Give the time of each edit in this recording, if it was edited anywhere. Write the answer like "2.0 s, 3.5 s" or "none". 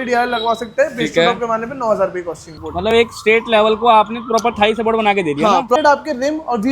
2.6 s, 5.8 s